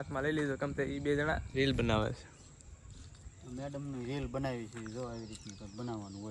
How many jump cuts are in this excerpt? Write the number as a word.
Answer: zero